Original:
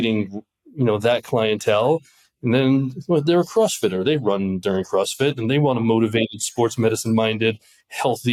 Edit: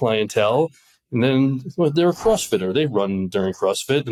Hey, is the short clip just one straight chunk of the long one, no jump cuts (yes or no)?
yes